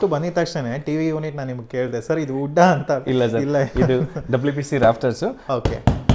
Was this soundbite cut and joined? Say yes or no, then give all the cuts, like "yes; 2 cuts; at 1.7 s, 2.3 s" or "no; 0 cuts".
no; 0 cuts